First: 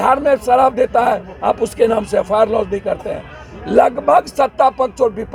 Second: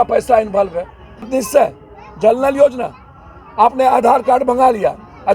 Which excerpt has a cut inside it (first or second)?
second